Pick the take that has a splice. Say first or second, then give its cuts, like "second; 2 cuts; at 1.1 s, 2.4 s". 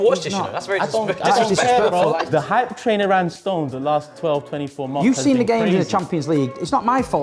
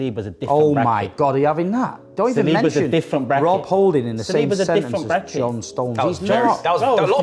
first; 1 cut; at 2.2 s